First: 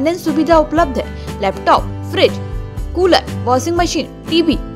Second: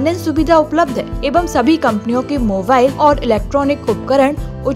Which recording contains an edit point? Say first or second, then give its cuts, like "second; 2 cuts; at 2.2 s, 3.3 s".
second; 2 cuts; at 1.2 s, 2.9 s